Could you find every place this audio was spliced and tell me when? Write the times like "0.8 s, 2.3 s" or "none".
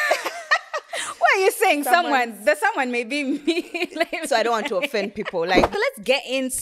5.7 s